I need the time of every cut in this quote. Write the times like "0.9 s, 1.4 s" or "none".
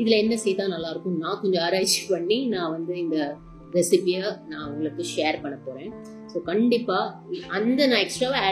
none